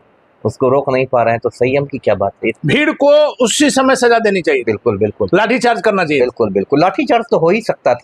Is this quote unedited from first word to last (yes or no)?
no